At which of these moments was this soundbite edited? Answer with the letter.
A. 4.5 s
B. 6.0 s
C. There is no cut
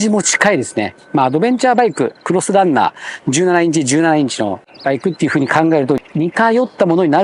B